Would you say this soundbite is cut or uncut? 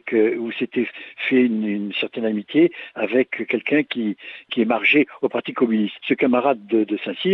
cut